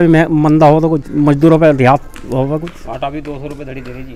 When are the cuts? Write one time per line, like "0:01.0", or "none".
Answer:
none